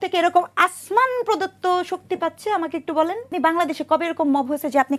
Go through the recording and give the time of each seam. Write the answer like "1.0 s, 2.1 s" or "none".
3.3 s